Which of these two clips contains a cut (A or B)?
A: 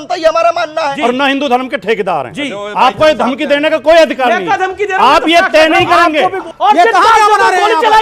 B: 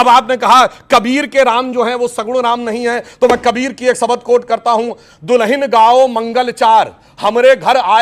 A